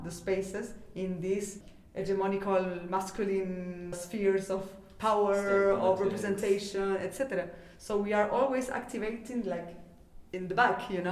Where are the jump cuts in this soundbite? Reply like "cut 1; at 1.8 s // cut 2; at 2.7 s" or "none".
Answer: cut 1; at 1.7 s // cut 2; at 4.0 s